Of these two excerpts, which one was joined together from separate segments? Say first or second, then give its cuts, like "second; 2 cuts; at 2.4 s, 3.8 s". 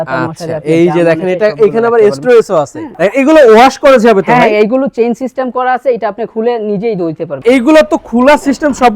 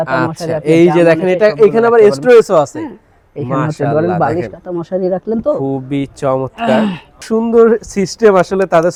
first; 2 cuts; at 2.8 s, 7.3 s